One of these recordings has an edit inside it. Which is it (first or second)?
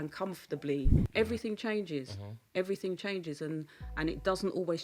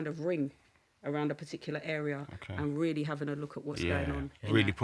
first